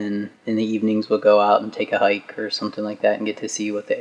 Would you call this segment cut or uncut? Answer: uncut